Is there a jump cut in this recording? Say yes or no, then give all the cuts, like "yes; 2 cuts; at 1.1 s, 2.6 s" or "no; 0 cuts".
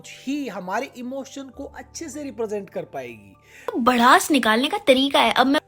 no; 0 cuts